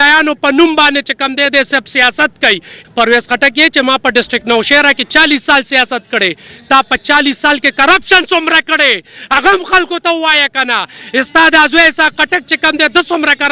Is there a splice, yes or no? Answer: yes